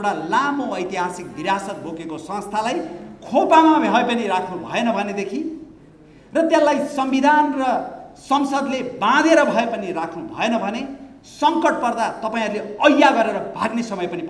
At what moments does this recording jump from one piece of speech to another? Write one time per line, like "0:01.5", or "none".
none